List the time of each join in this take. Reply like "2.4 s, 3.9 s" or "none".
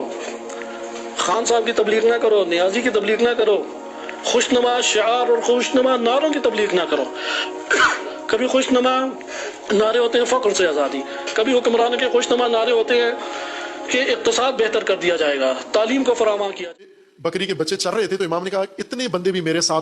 16.8 s